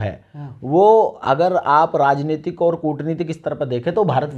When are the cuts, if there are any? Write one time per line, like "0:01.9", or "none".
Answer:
none